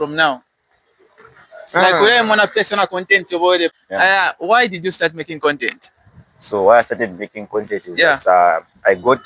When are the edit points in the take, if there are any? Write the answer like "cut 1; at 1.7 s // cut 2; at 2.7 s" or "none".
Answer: cut 1; at 3.7 s